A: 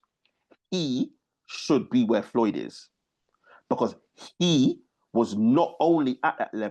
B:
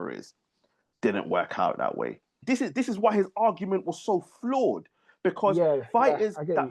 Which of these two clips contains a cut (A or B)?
B